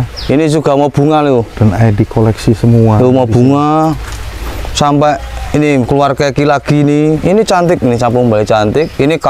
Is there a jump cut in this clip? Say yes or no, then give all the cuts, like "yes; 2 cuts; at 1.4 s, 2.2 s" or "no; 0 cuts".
no; 0 cuts